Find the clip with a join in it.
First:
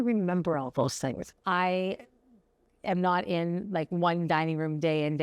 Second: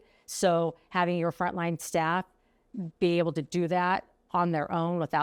first; 1 cut; at 1.3 s

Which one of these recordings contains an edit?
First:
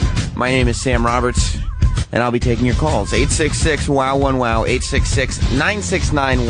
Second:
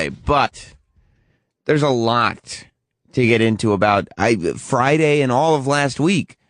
second; 1 cut; at 5.5 s

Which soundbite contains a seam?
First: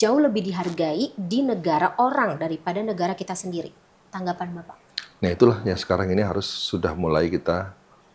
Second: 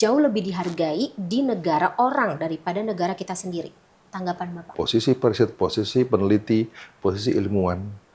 second; 1 cut; at 4.7 s

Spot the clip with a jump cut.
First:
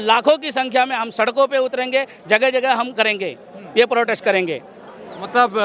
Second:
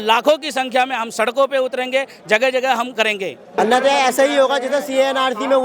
second; 1 cut; at 3.6 s

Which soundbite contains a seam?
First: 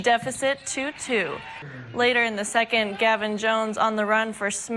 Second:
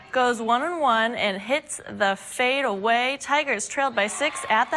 first; 1 cut; at 1.6 s

